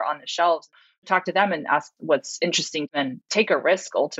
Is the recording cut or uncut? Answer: cut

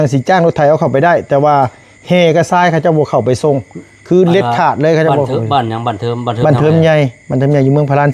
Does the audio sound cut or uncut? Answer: uncut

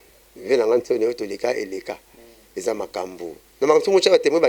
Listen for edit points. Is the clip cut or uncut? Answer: uncut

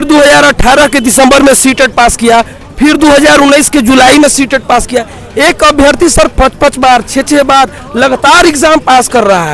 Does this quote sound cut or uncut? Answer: uncut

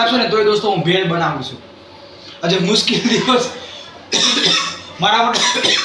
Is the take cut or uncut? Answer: uncut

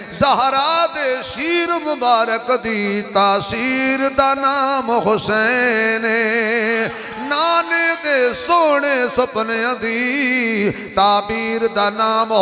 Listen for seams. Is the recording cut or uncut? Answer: uncut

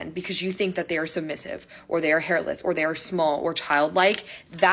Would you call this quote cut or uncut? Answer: uncut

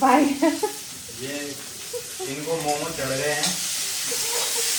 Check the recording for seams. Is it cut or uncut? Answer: uncut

